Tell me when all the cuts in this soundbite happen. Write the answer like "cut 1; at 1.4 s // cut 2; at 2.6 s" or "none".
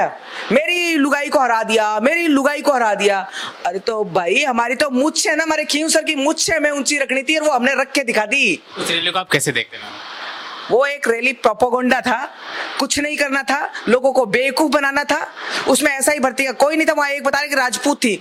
none